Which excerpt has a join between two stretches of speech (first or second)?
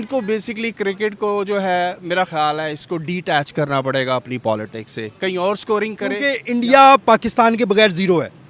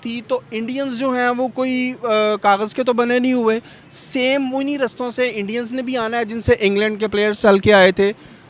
first